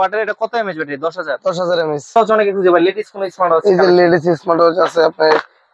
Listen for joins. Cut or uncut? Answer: cut